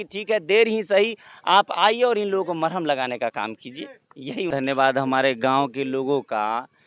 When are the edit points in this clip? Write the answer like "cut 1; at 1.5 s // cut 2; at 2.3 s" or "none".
cut 1; at 4.5 s